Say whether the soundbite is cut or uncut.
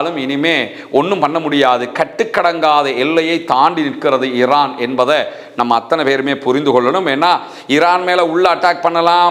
uncut